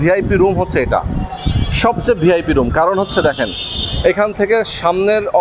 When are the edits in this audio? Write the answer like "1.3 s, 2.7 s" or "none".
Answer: none